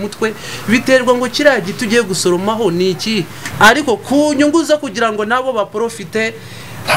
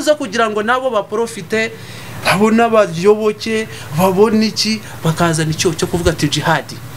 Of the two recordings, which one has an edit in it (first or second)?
first